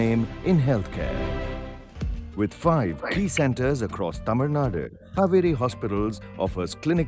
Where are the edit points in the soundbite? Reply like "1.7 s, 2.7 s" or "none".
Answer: 5.0 s

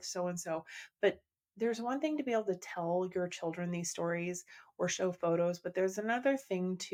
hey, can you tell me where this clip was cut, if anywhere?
none

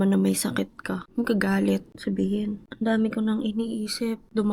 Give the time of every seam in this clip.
1.0 s

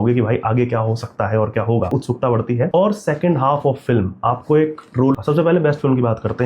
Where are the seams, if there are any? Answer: 2.3 s, 5.1 s

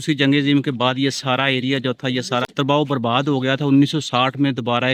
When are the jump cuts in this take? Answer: 2.5 s

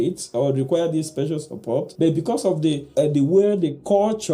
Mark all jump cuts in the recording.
1.9 s, 2.8 s

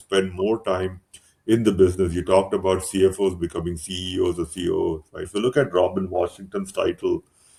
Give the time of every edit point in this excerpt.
none

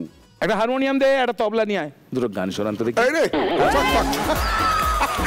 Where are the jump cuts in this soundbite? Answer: none

